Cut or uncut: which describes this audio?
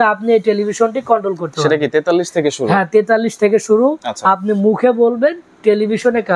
uncut